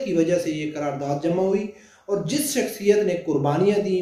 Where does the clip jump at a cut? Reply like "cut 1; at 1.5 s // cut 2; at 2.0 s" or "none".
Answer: none